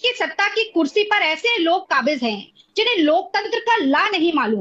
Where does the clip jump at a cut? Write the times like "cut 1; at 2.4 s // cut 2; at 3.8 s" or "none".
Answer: none